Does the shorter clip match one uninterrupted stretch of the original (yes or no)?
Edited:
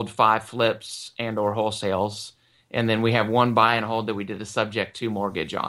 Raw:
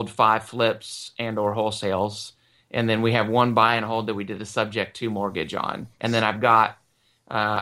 yes